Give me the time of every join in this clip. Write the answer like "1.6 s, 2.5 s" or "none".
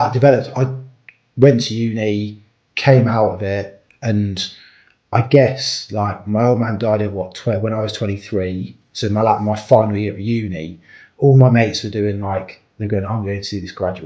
none